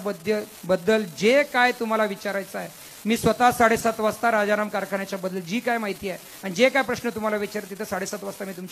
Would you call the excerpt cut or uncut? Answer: uncut